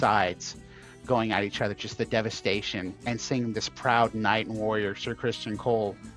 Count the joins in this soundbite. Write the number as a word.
one